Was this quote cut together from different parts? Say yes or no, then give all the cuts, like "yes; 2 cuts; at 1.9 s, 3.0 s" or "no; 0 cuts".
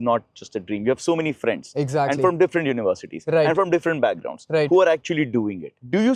no; 0 cuts